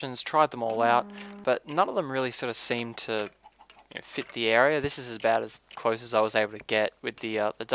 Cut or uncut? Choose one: cut